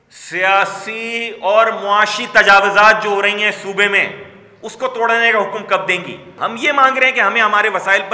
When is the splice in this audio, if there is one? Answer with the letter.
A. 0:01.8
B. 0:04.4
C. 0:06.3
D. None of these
C